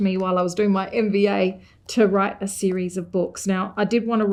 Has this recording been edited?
no; 0 cuts

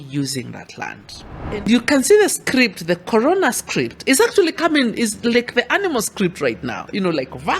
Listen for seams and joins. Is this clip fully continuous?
no; 1 cut; at 1.7 s

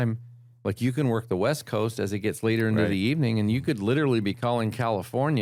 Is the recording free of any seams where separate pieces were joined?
yes; 0 cuts

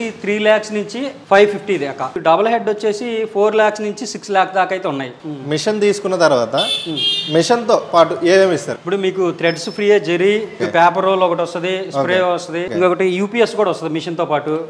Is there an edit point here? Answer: yes; 5 cuts; at 2.1 s, 5.2 s, 8.7 s, 10.6 s, 12.7 s

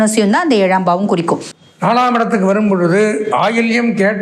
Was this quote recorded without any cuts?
no; 1 cut; at 1.5 s

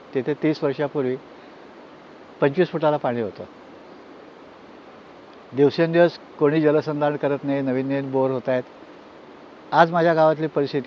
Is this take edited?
no; 0 cuts

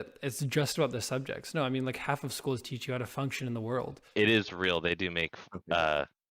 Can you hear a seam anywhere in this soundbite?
yes; 1 cut; at 4.0 s

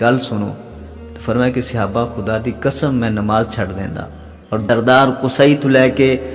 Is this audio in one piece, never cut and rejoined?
no; 1 cut; at 4.6 s

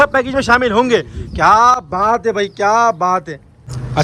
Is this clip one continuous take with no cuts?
yes; 0 cuts

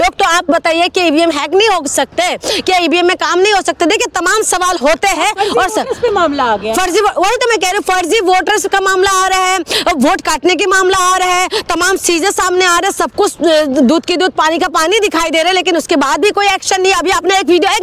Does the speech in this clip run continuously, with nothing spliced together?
yes; 0 cuts

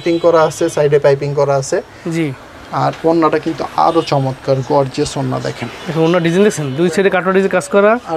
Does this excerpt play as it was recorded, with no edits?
yes; 0 cuts

